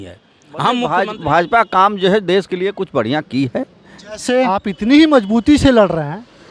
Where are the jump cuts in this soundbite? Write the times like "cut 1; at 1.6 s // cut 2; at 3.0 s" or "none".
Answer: cut 1; at 0.9 s // cut 2; at 4.7 s